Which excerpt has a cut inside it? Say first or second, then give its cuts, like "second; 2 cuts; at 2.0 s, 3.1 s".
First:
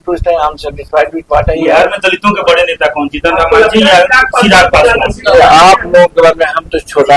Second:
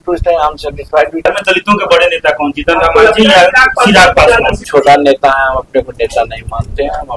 second; 2 cuts; at 1.3 s, 4.6 s